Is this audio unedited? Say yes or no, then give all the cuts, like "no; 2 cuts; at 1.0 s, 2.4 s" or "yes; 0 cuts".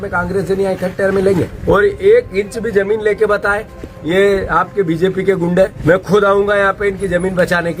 no; 2 cuts; at 1.5 s, 5.8 s